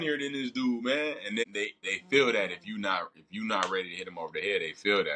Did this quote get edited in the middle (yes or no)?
yes